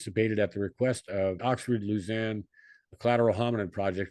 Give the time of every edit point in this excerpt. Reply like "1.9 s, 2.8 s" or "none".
1.4 s

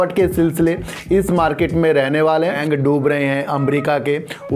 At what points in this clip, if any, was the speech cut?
2.6 s

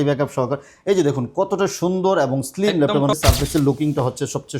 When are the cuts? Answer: 3.1 s

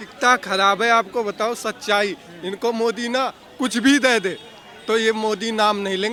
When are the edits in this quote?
none

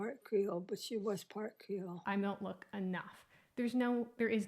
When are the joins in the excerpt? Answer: 1.9 s

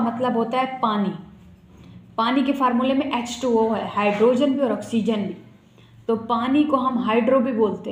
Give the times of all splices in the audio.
none

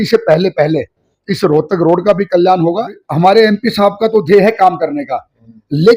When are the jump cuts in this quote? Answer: 3.0 s

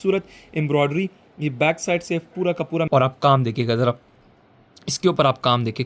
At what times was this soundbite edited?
2.9 s

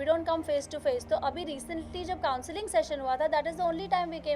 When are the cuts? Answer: none

